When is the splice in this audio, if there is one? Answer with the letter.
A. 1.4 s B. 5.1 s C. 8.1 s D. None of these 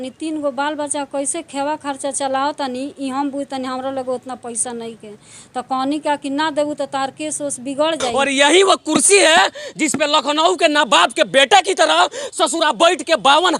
C